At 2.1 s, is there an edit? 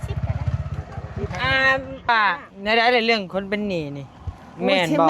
yes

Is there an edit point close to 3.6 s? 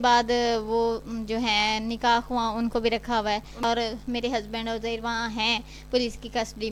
yes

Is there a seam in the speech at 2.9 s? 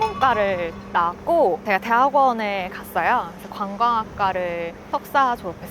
no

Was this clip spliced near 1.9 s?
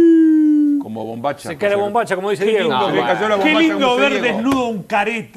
yes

